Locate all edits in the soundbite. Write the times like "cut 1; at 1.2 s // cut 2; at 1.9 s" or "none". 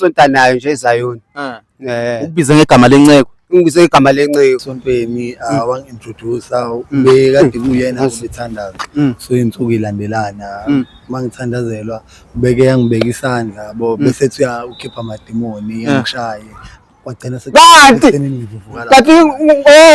cut 1; at 4.6 s